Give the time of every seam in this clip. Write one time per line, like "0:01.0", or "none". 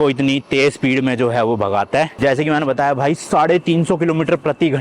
0:02.1